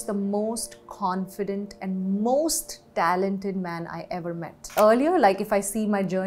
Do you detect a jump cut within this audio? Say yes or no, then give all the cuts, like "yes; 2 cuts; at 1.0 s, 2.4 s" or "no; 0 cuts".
yes; 1 cut; at 4.7 s